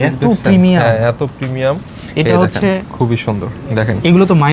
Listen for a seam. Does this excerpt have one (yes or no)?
no